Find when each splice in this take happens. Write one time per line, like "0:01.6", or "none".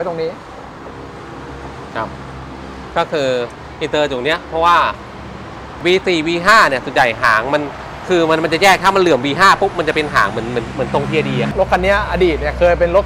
0:05.8
0:11.5